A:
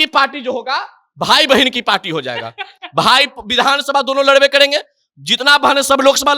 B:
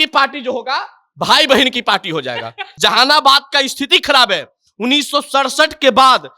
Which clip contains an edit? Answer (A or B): B